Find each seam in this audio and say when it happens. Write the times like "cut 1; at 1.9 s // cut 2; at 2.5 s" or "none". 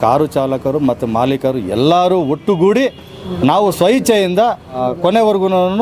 cut 1; at 4.8 s

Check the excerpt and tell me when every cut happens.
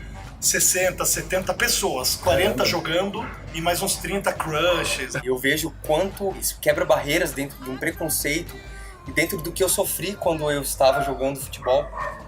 cut 1; at 5.1 s // cut 2; at 6.5 s // cut 3; at 7.6 s

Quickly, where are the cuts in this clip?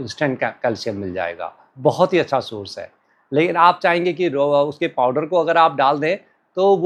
none

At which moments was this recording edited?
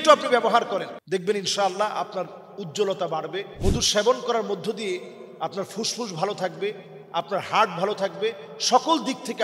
cut 1; at 1.0 s // cut 2; at 3.5 s

